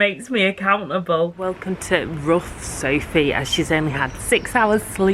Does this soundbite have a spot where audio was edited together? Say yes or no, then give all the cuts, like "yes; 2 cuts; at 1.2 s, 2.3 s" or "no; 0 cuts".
yes; 1 cut; at 1.4 s